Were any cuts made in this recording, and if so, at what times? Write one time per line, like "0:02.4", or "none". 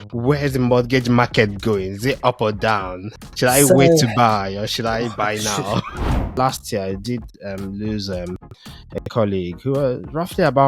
0:06.4